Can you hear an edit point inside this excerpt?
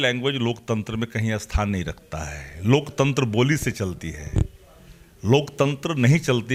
no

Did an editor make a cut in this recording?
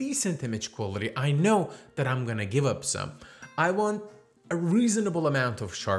no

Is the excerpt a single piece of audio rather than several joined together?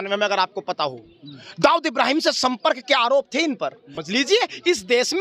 no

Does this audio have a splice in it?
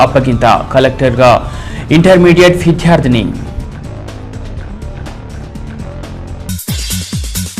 yes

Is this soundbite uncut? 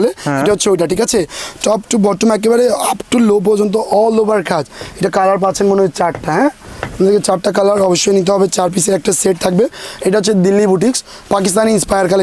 yes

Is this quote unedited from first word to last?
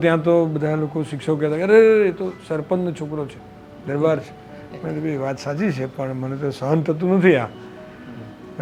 yes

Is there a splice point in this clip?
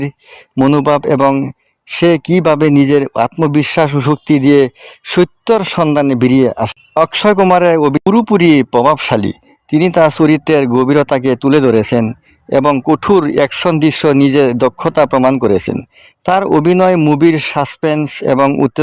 yes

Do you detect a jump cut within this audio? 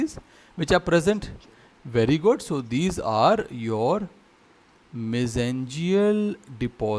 no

